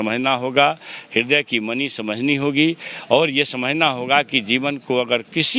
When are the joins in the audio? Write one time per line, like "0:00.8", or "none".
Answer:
none